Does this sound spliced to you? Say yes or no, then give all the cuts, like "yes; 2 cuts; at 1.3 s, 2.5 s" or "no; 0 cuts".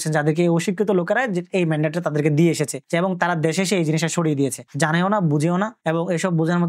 yes; 1 cut; at 4.6 s